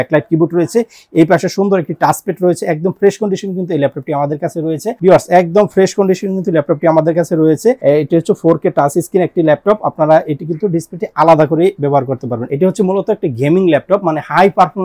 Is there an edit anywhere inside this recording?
yes; 3 cuts; at 4.9 s, 7.8 s, 12.4 s

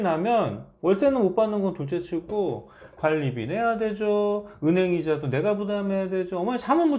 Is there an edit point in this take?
no; 0 cuts

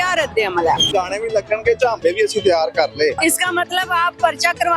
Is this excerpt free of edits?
no; 2 cuts; at 0.9 s, 3.2 s

